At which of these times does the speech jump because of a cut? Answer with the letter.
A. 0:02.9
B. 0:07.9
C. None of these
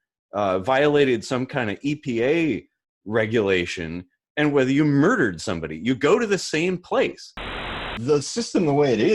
B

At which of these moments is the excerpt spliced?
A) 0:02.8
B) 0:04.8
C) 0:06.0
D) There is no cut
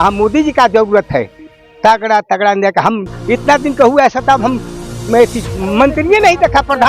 C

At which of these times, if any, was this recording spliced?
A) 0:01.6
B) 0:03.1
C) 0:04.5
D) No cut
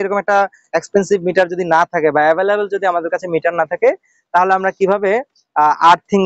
D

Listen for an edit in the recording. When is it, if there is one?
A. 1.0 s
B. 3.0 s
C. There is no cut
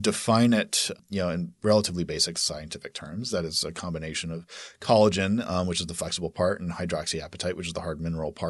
A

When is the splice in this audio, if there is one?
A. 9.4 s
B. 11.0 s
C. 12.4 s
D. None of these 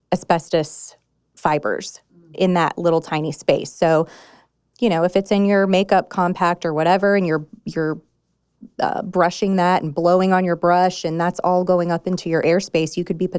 C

